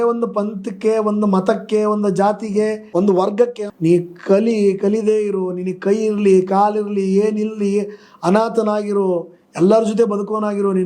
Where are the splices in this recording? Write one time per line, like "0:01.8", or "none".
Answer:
0:02.8
0:03.6